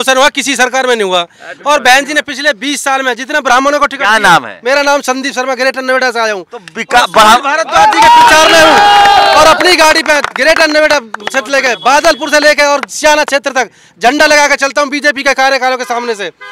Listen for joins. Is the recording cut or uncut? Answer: uncut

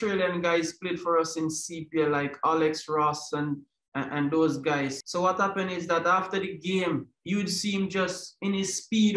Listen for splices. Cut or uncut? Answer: cut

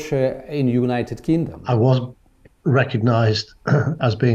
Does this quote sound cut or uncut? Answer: cut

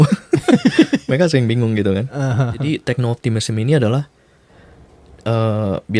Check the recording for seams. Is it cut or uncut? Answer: cut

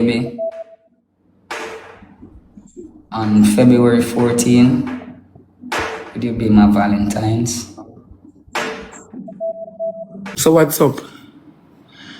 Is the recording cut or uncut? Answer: cut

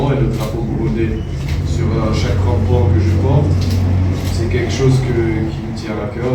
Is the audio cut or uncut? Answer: uncut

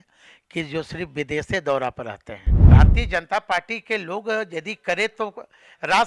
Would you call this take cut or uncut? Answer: cut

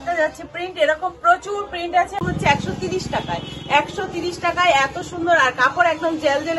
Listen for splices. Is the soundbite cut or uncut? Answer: cut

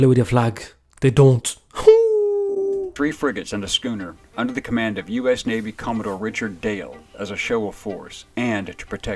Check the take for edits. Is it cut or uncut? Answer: uncut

